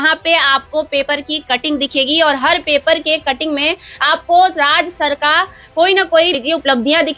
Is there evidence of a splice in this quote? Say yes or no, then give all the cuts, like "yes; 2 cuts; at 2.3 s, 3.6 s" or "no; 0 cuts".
no; 0 cuts